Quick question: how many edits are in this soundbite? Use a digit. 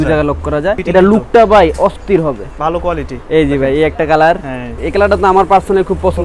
3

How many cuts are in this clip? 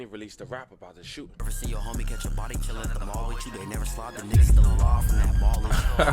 1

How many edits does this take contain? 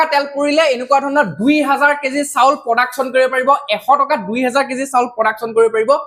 0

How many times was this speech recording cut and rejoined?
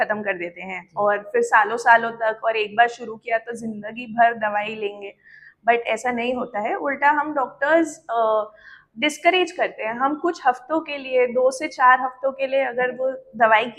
0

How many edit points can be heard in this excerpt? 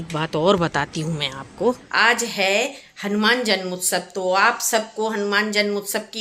1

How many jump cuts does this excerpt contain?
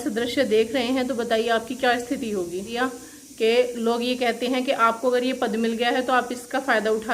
1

